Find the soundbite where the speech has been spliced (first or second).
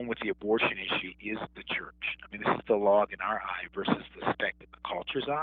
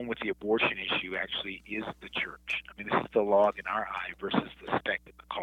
first